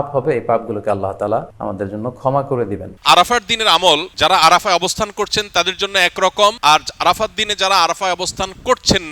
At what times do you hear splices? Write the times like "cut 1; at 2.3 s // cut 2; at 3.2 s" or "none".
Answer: cut 1; at 1.5 s // cut 2; at 2.9 s // cut 3; at 4.1 s // cut 4; at 6.6 s